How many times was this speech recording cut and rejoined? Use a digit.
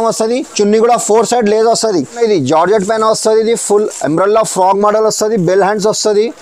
1